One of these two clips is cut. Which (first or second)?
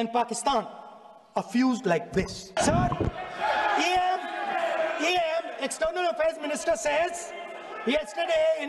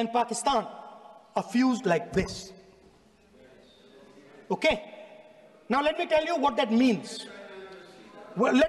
first